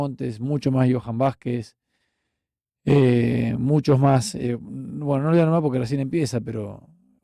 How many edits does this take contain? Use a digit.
0